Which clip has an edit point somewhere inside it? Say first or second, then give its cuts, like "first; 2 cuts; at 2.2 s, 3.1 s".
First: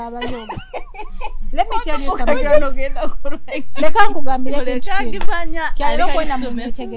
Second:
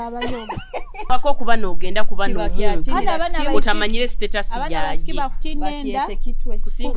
second; 1 cut; at 1.1 s